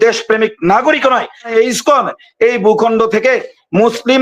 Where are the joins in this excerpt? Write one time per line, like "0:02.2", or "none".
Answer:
0:01.5